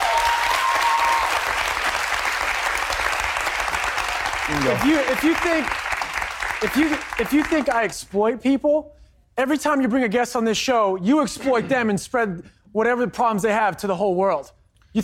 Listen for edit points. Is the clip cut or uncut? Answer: cut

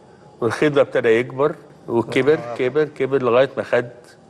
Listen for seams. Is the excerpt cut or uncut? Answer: cut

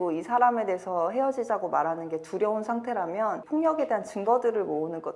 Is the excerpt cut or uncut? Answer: cut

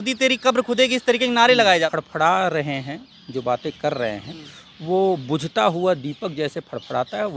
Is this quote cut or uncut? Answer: cut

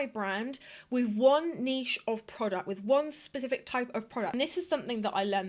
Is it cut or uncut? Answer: cut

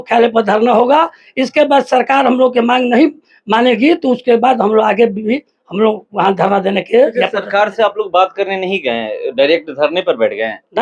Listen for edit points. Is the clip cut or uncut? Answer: uncut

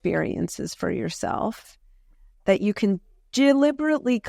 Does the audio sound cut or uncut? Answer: uncut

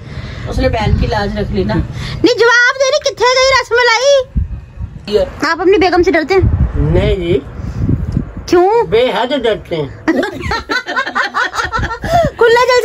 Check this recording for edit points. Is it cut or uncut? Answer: cut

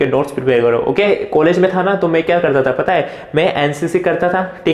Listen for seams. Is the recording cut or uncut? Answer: cut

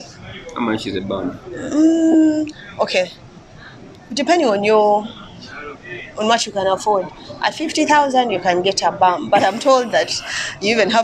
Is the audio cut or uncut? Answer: uncut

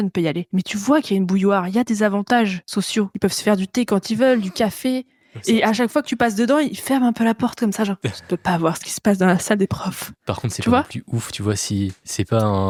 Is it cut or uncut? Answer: uncut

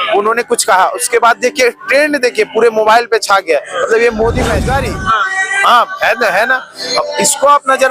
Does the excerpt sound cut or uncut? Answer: cut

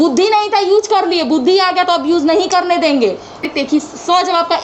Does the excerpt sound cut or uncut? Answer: cut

